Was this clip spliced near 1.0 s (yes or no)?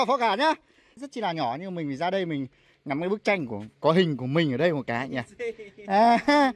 yes